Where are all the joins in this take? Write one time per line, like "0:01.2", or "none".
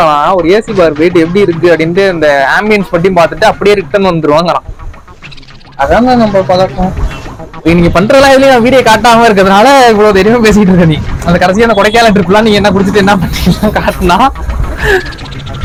none